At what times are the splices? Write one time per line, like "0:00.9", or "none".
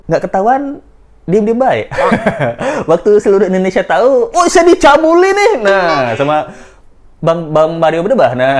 none

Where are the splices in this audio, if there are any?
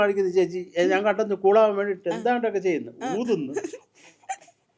none

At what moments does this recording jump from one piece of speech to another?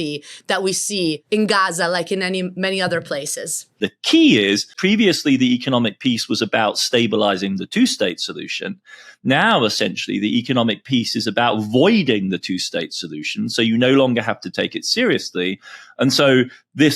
0:01.2
0:03.8
0:04.8

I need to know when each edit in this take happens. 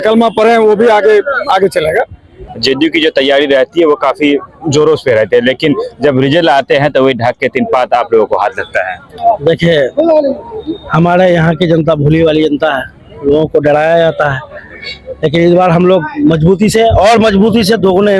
0:02.4

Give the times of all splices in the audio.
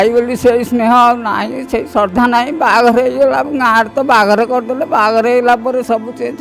none

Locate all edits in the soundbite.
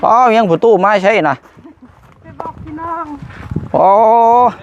none

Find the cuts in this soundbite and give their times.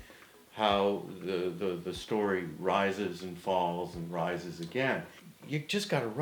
0:05.2

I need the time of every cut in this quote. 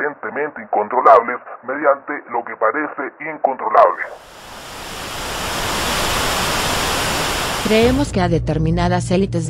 none

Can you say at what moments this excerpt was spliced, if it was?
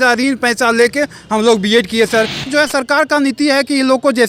0:02.5

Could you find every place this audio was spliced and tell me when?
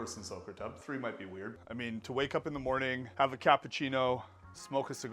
0:01.5
0:03.0

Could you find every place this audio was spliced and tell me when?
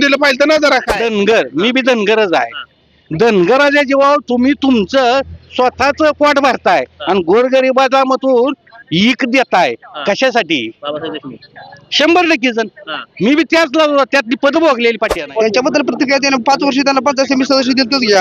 0:00.9
0:15.2

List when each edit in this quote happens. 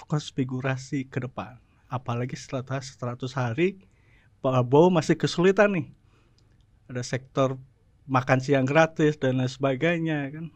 none

